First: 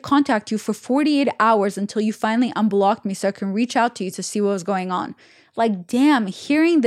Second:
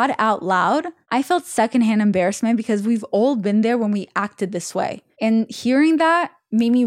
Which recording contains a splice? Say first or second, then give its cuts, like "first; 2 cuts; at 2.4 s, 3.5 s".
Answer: second; 2 cuts; at 1.0 s, 5.0 s